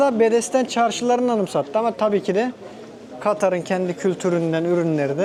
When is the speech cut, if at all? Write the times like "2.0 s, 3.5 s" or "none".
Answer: none